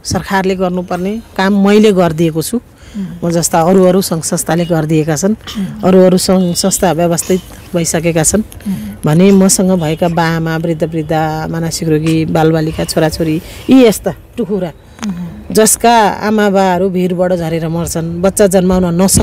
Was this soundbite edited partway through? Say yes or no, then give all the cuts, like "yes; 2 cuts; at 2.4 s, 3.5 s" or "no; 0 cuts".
no; 0 cuts